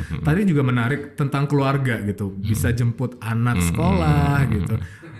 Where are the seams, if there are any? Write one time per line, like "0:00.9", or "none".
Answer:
none